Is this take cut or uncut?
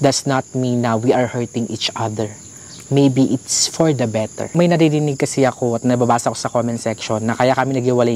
cut